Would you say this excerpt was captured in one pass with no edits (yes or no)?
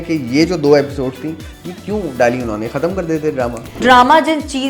no